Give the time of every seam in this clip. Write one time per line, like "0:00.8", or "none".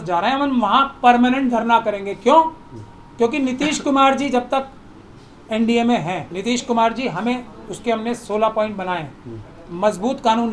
0:06.3